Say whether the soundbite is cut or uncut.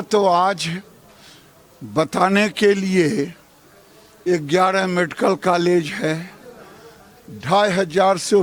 uncut